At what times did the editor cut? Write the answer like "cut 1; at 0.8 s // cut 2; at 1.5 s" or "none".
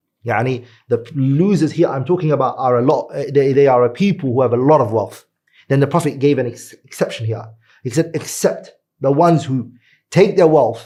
none

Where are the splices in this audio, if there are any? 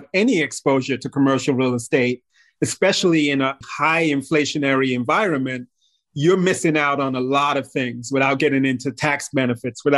cut 1; at 3.4 s

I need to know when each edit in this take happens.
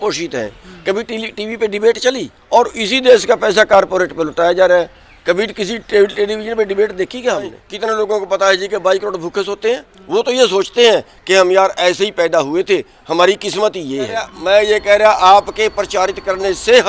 cut 1; at 2.3 s // cut 2; at 7.6 s // cut 3; at 9.9 s // cut 4; at 14.3 s

